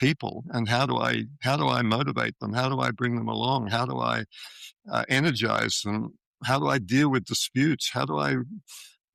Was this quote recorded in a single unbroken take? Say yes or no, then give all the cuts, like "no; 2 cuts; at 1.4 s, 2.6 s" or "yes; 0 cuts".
yes; 0 cuts